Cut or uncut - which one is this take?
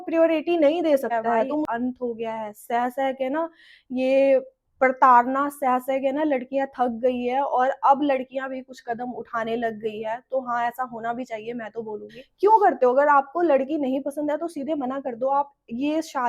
cut